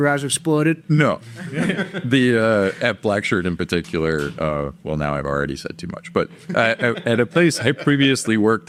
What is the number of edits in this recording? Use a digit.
0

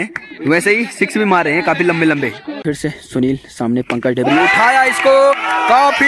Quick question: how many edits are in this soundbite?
1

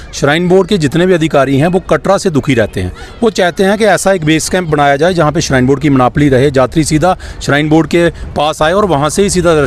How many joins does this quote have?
0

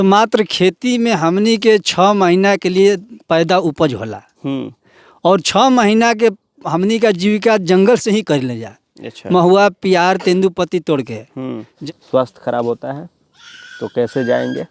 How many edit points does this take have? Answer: 1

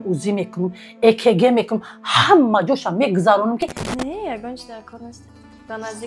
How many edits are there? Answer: 1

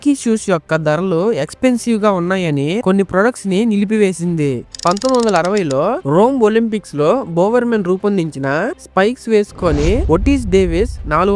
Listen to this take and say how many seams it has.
1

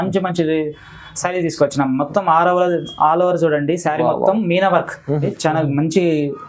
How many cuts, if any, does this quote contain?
1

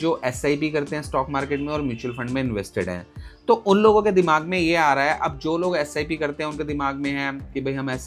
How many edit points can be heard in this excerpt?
0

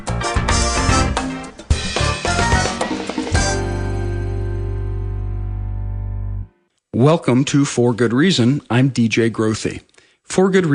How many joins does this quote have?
0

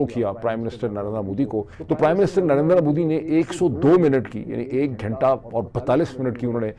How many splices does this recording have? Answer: 1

